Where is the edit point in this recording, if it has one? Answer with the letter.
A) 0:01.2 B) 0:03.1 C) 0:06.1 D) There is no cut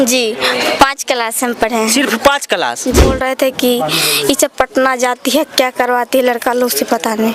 B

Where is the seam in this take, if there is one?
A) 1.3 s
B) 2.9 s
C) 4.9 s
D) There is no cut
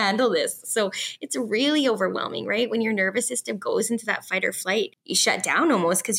C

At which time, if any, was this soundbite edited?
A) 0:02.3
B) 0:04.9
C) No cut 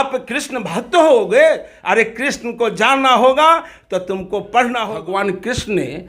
B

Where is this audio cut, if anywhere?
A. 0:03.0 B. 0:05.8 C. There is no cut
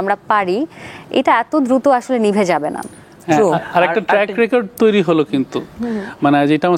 C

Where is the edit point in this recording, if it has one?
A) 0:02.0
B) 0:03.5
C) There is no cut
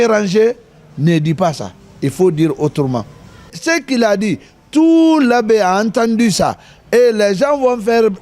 B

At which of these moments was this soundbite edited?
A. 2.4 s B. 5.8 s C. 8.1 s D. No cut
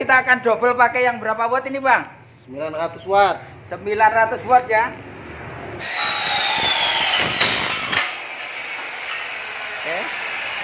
B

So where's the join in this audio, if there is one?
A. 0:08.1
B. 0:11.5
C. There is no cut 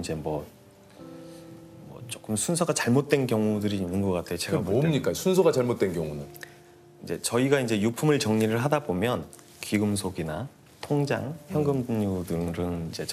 C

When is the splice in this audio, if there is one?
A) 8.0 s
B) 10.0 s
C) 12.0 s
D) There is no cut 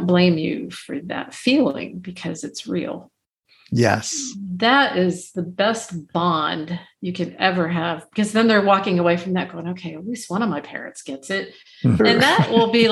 C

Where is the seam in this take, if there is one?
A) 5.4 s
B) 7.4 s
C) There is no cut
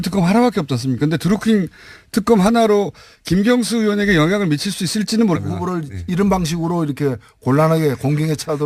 C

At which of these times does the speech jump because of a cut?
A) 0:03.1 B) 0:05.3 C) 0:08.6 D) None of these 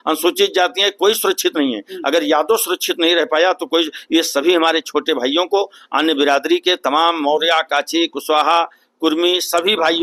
D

